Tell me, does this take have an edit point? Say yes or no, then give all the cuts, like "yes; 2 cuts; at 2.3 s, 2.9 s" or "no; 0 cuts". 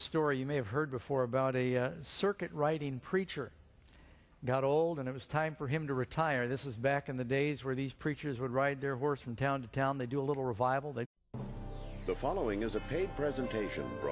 no; 0 cuts